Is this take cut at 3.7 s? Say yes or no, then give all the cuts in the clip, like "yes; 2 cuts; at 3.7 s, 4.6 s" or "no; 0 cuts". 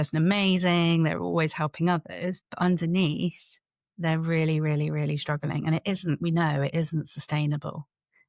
no; 1 cut; at 2.4 s